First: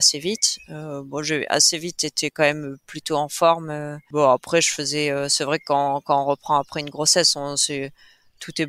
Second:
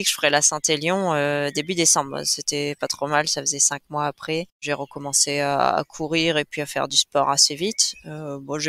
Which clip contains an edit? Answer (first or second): second